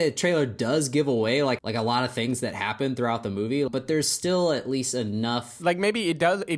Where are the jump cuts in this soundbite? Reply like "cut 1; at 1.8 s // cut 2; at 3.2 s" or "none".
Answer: cut 1; at 1.6 s // cut 2; at 3.7 s // cut 3; at 5.5 s